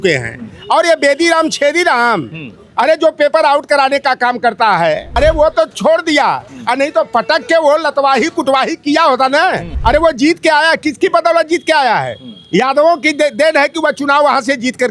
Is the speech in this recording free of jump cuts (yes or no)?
no